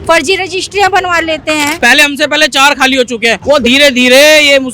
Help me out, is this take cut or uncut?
cut